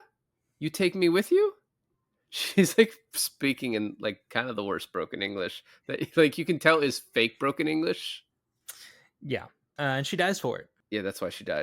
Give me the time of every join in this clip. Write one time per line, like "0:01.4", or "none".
0:10.7